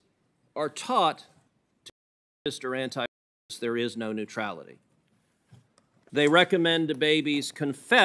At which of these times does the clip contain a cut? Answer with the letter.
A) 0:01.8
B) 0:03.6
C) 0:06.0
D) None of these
C